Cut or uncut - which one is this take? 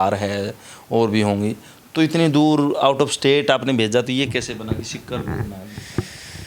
uncut